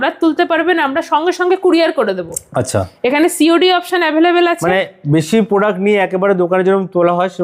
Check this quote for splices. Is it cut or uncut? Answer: uncut